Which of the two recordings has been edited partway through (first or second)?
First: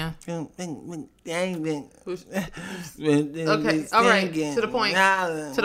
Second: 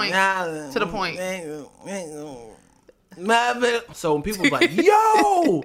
second